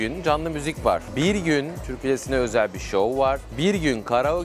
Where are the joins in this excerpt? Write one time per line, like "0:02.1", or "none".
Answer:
0:01.1
0:01.8